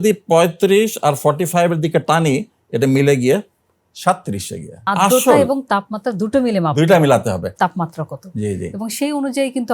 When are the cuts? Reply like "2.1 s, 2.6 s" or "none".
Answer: 4.9 s, 7.5 s